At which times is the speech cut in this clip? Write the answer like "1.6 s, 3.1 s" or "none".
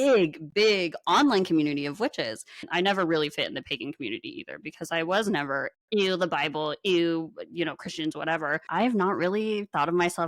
2.7 s, 8.6 s